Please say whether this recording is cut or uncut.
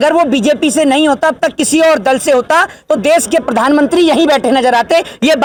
uncut